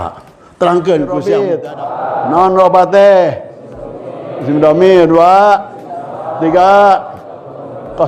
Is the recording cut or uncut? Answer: cut